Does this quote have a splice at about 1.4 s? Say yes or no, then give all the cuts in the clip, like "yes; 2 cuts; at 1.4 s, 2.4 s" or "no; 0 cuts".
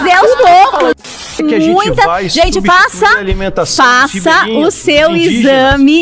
yes; 1 cut; at 1.4 s